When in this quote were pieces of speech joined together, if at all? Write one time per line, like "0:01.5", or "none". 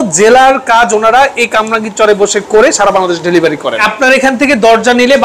0:03.8